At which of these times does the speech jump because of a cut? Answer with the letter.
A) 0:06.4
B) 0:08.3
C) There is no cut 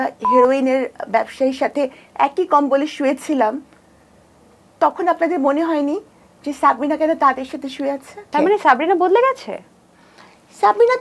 B